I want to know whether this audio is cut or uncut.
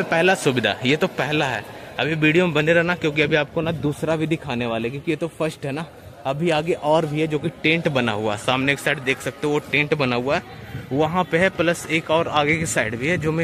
uncut